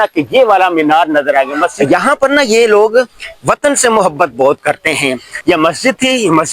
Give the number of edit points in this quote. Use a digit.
2